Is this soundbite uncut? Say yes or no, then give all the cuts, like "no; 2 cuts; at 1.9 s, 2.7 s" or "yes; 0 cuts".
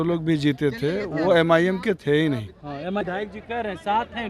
no; 1 cut; at 3.0 s